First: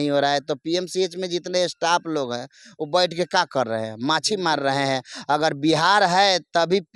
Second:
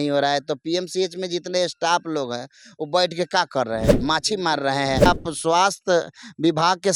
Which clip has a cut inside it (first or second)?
second